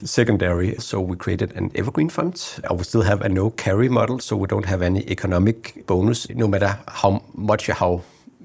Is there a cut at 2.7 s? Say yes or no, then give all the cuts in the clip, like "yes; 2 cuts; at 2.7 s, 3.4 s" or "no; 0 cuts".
yes; 3 cuts; at 0.8 s, 2.7 s, 5.9 s